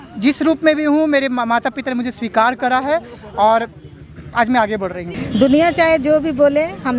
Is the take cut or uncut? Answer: cut